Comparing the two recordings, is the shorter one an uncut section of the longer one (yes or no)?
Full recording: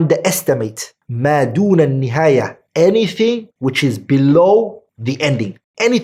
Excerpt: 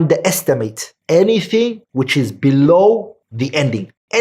no